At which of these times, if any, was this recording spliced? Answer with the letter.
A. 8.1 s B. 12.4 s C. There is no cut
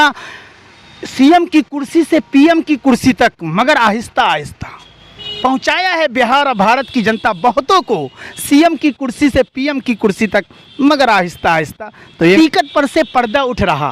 B